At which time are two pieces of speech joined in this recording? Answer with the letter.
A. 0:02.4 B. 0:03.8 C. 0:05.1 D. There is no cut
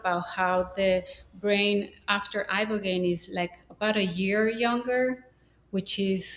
D